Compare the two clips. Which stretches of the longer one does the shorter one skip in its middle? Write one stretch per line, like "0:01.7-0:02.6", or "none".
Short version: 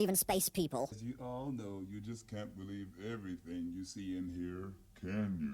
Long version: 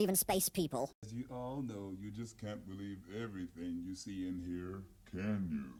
0:01.0-0:01.1